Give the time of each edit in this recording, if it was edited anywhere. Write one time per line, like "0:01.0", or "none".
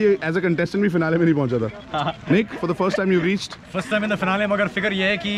none